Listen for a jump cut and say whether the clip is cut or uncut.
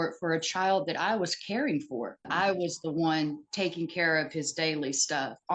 cut